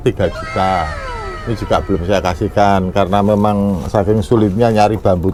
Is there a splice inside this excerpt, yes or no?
no